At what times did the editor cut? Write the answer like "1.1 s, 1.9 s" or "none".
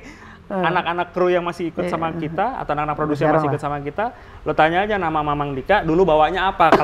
none